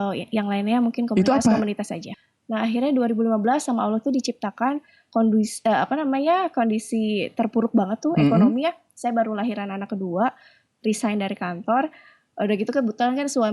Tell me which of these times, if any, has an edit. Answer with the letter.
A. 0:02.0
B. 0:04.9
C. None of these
A